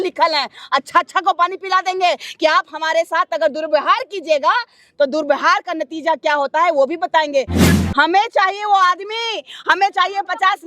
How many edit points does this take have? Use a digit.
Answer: 1